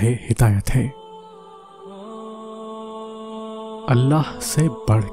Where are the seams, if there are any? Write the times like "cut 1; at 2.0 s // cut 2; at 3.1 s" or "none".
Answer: cut 1; at 1.0 s // cut 2; at 3.9 s